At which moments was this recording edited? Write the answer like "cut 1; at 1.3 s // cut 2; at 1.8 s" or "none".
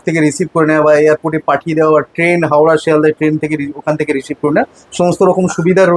none